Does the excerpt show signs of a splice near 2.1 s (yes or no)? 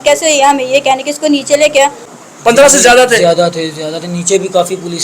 yes